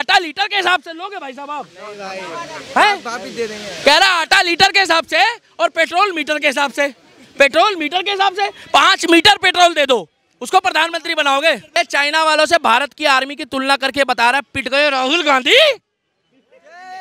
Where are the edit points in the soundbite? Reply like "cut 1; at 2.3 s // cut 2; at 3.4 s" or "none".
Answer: cut 1; at 11.8 s